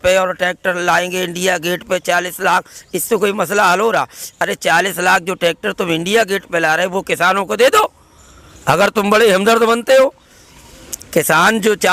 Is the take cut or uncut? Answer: uncut